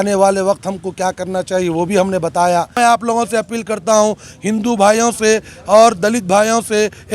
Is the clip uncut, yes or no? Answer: no